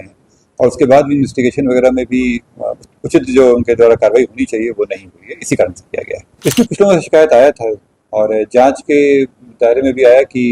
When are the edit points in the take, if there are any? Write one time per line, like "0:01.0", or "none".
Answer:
0:06.2